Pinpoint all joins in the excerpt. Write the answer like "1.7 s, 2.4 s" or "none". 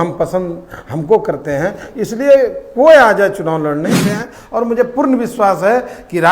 4.0 s